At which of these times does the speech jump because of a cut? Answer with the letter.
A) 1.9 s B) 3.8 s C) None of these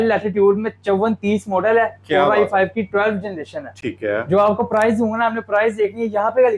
C